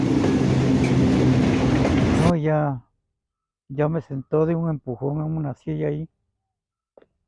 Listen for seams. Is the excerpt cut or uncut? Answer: cut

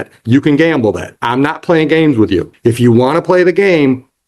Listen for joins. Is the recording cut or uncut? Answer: cut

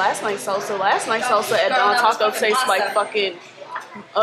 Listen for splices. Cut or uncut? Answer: uncut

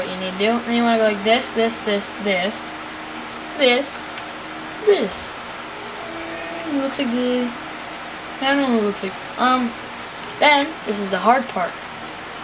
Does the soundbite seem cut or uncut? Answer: uncut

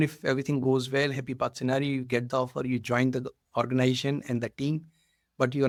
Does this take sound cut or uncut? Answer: uncut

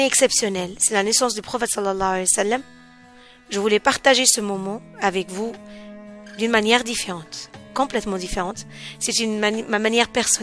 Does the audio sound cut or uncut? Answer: uncut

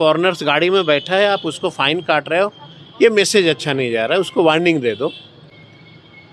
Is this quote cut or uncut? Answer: uncut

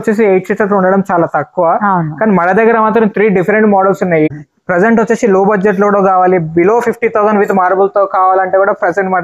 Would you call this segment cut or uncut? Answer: cut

